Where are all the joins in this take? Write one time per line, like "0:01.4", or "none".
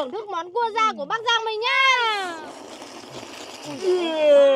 0:02.2